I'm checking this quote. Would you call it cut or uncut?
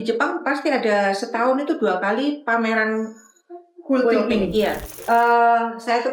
cut